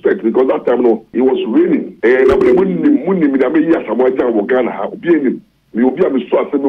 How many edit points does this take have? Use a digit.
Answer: 2